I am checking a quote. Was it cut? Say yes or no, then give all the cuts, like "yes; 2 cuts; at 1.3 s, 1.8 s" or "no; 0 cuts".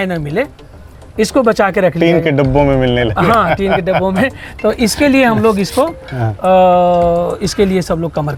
no; 0 cuts